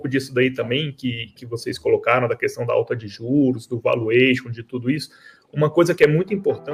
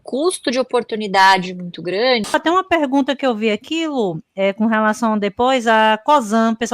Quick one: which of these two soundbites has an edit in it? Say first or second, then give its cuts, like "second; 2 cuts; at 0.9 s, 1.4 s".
second; 1 cut; at 2.3 s